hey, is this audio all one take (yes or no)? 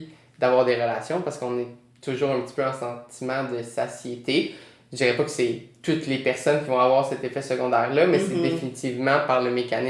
yes